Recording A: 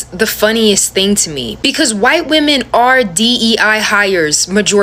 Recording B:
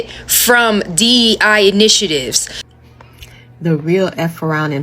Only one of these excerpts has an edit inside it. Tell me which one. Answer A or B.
B